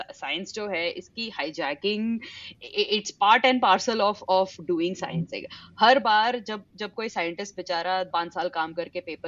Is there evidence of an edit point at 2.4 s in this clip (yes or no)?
yes